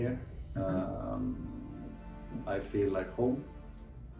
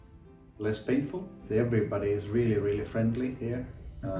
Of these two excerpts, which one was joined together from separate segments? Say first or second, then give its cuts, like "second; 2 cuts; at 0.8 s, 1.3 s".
second; 1 cut; at 1.4 s